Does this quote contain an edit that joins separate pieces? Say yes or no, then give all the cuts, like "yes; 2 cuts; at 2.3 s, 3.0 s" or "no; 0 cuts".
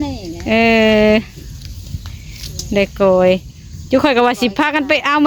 no; 0 cuts